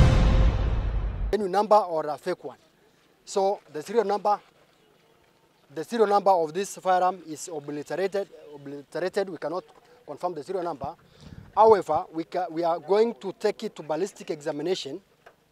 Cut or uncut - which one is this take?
cut